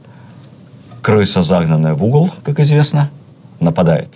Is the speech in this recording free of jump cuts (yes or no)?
yes